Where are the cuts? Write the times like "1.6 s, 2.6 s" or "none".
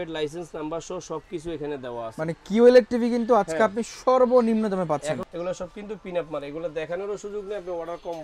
5.3 s